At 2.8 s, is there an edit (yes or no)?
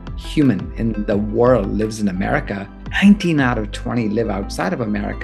yes